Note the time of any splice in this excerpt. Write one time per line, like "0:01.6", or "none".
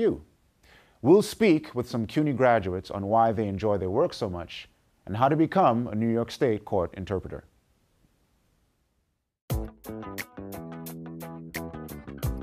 none